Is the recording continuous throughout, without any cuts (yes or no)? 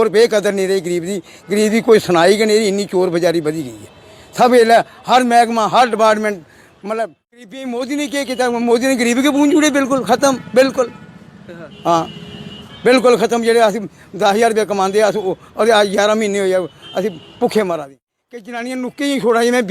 no